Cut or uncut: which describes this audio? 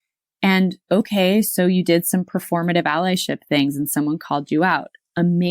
cut